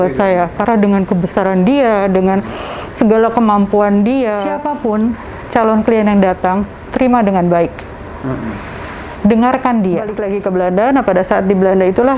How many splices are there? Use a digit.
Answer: 2